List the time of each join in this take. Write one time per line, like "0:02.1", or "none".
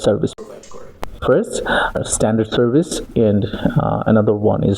0:01.1
0:02.0